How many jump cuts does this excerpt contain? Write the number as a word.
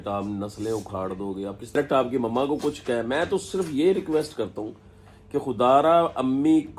one